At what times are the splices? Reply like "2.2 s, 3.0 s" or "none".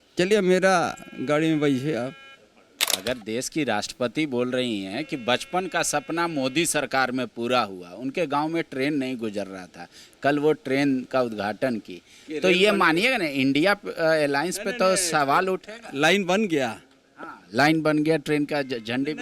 2.9 s